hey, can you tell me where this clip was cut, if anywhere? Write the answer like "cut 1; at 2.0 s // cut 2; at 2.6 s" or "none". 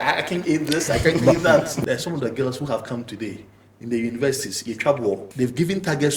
cut 1; at 1.7 s // cut 2; at 5.3 s

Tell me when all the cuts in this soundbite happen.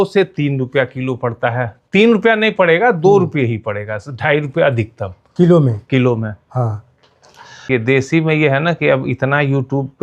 cut 1; at 7.6 s

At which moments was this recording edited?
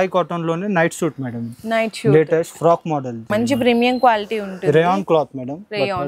cut 1; at 3.2 s

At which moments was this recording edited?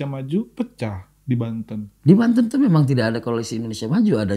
none

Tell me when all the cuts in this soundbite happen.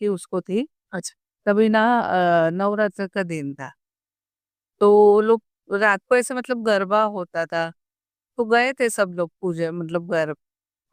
none

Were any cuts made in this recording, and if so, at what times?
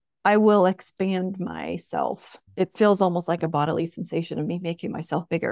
none

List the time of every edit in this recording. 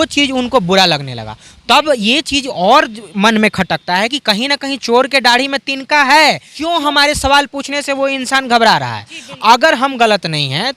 cut 1; at 6.5 s

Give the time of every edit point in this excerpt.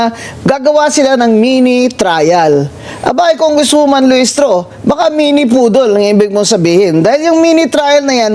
none

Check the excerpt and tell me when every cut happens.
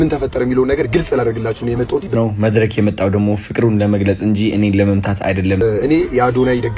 cut 1; at 2.1 s // cut 2; at 5.6 s

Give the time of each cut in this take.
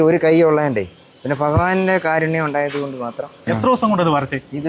cut 1; at 3.5 s

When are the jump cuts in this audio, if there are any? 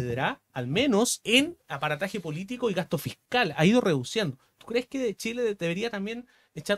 cut 1; at 1.2 s

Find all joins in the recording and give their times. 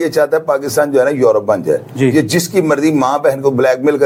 none

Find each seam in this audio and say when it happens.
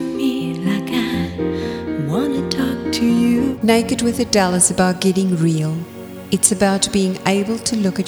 cut 1; at 3.5 s

